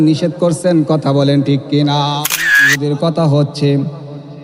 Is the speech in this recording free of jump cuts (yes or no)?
no